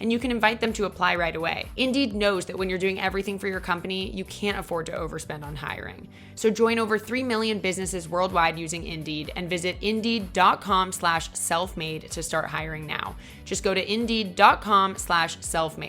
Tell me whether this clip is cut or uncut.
cut